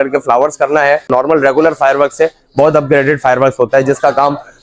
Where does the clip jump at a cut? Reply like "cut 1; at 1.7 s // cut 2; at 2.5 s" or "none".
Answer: cut 1; at 1.1 s